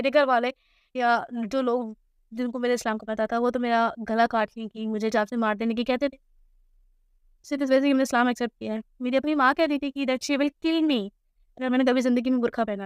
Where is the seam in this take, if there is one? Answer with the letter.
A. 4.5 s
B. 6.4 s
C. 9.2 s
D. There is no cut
D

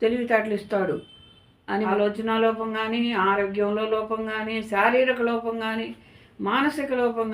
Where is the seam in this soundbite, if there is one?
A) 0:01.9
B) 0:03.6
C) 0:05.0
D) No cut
A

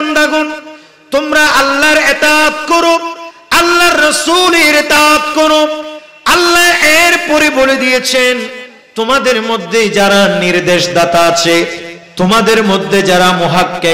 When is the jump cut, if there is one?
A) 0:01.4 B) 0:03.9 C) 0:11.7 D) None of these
D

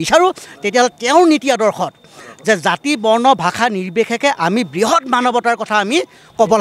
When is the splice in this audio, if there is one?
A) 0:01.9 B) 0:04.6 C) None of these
C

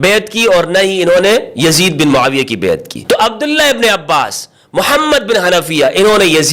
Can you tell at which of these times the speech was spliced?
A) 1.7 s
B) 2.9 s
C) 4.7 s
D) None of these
B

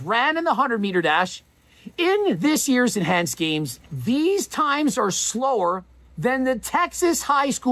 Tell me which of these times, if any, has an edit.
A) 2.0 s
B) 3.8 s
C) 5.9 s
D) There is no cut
B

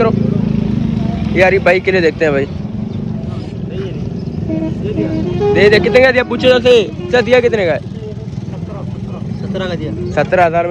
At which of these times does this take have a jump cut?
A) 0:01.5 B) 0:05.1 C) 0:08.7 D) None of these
D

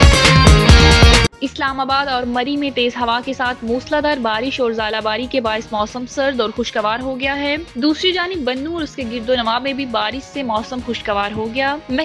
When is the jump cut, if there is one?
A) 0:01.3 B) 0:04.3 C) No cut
A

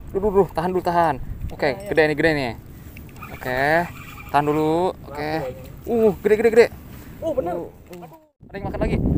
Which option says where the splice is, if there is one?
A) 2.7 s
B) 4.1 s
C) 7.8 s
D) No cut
C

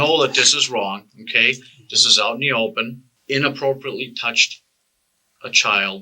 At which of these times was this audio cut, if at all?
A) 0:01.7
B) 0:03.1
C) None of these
B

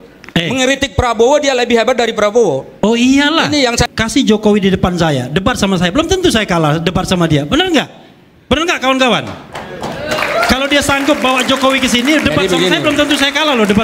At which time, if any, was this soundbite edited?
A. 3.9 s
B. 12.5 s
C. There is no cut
A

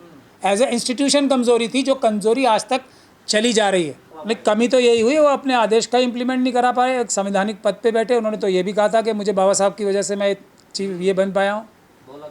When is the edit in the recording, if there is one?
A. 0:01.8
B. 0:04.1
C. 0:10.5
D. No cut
B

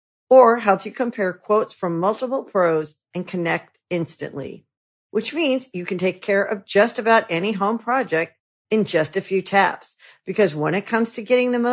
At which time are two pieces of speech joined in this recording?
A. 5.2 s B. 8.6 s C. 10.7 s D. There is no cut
D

